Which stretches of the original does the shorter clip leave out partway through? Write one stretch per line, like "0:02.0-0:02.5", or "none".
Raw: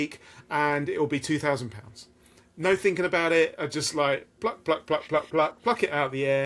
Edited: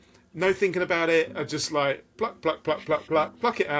none